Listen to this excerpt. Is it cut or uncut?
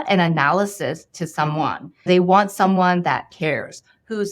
cut